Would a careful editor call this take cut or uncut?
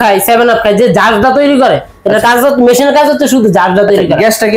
uncut